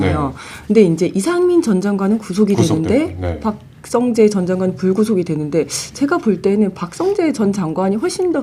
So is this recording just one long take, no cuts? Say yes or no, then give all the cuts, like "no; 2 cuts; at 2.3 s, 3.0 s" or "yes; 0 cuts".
yes; 0 cuts